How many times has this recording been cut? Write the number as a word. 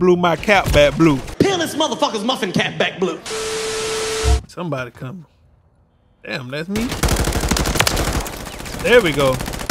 one